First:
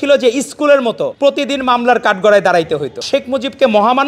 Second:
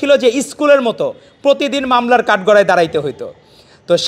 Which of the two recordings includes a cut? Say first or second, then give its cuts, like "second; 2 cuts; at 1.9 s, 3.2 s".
first; 2 cuts; at 1.1 s, 3.0 s